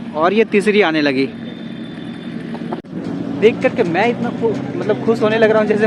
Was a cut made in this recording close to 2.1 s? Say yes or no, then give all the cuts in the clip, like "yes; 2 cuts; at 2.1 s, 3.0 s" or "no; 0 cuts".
no; 0 cuts